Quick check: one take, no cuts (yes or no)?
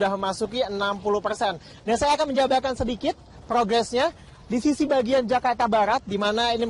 yes